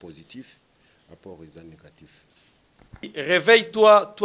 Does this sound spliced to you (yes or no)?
yes